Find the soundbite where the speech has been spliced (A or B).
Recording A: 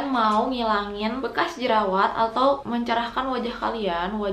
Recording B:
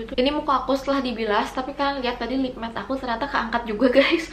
A